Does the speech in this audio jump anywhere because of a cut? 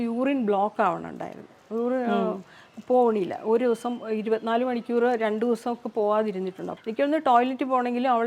yes; 1 cut; at 6.7 s

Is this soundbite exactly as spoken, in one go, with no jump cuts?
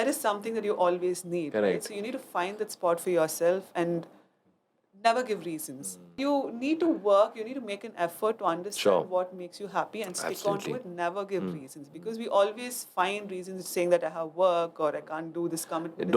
no; 1 cut; at 6.2 s

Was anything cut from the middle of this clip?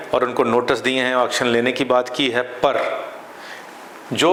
no; 0 cuts

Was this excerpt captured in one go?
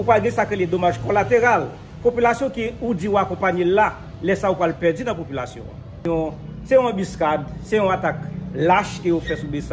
no; 1 cut; at 6.0 s

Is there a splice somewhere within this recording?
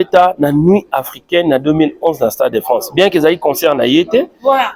no; 0 cuts

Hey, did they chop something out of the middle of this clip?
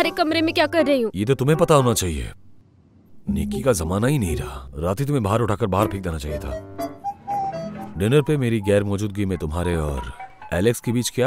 yes; 1 cut; at 7.7 s

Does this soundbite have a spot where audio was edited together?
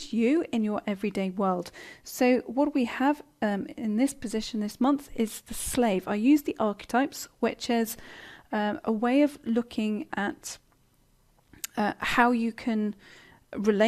no; 0 cuts

